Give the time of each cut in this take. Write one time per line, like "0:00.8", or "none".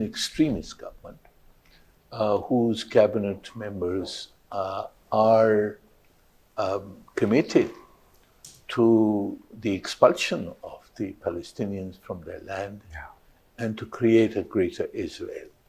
none